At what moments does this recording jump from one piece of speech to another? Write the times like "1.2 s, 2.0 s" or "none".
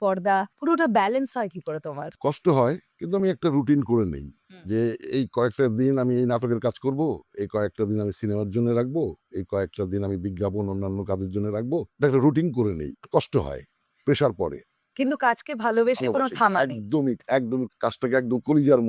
none